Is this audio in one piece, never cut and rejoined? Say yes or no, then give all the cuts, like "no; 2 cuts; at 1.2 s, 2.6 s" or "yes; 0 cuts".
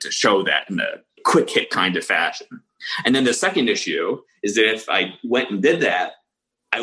no; 1 cut; at 1.2 s